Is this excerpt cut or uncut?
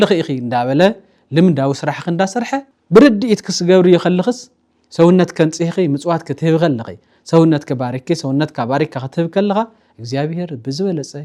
uncut